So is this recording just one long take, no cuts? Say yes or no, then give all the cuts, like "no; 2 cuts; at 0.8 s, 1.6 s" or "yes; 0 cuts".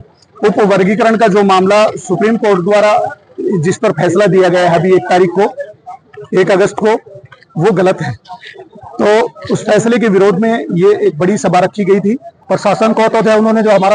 no; 1 cut; at 12.3 s